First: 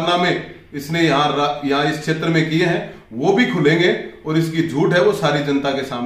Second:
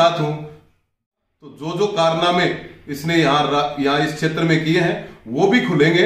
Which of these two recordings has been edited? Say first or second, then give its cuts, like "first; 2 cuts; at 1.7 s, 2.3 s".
second; 1 cut; at 1.1 s